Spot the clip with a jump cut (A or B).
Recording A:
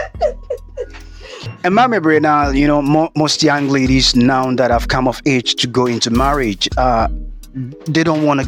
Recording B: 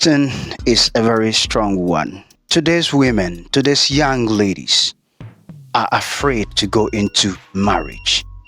B